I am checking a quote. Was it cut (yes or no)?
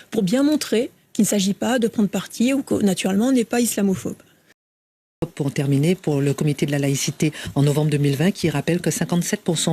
yes